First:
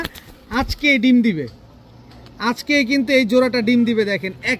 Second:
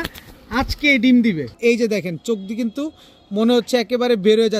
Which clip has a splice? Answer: second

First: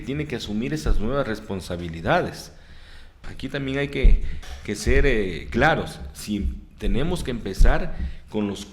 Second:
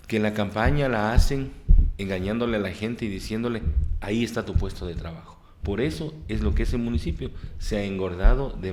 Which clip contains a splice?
first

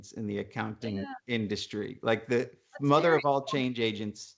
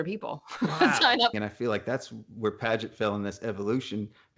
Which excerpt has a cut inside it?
second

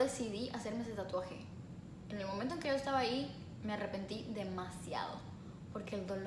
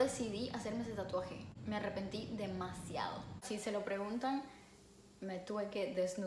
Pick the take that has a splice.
second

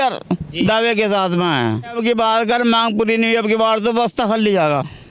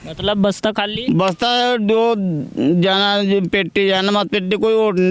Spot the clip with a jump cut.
first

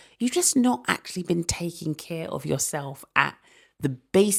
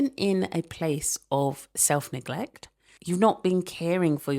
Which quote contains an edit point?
second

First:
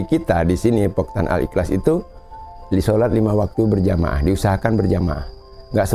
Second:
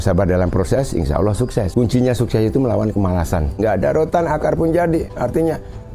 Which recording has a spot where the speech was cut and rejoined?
second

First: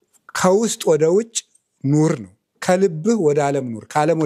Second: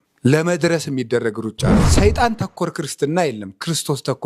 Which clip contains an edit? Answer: second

